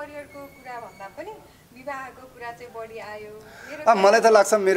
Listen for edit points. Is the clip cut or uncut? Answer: uncut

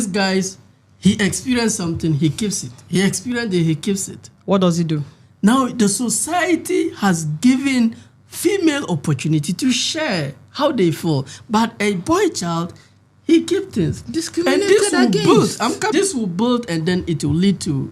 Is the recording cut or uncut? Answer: cut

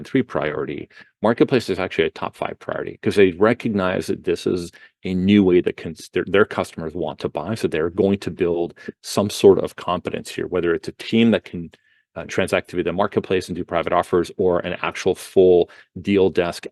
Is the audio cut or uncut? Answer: uncut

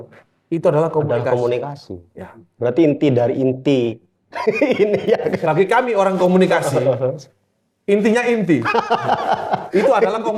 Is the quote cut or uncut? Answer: uncut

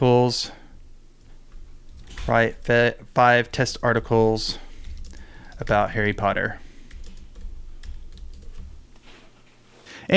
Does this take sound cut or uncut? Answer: cut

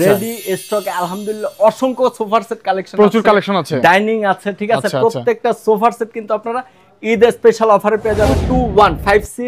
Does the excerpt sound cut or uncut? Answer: cut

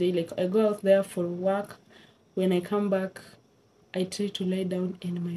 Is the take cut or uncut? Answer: uncut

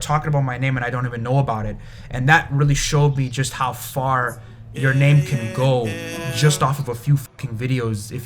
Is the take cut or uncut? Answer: uncut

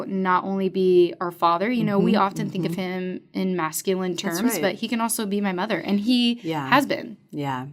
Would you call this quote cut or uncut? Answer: uncut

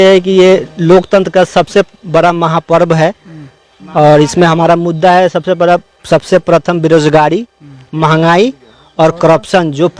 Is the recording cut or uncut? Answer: uncut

